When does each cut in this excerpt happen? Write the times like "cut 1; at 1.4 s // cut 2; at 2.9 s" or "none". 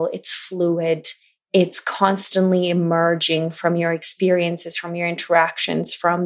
none